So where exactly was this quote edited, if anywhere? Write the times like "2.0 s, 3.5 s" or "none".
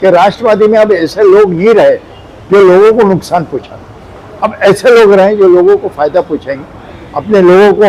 none